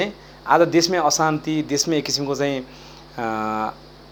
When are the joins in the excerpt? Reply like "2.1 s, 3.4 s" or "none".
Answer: none